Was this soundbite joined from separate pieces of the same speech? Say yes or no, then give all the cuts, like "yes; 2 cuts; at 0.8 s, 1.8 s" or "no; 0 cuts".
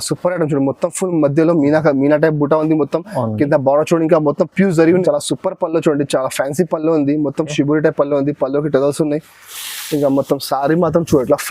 yes; 1 cut; at 5.0 s